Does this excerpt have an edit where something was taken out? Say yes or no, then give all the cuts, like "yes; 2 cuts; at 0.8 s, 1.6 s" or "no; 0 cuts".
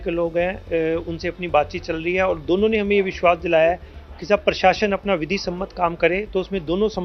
no; 0 cuts